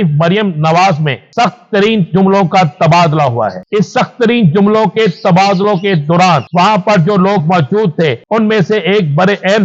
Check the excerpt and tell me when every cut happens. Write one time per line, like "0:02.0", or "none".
0:01.2
0:03.6
0:06.5
0:08.2